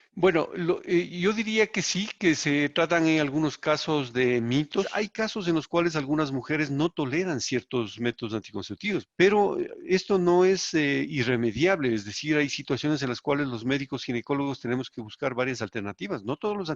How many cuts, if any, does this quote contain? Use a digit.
2